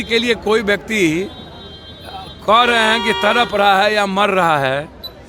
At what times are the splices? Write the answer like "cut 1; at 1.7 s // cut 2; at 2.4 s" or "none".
none